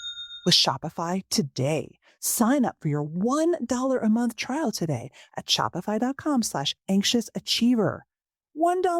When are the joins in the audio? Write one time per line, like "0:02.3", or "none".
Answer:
none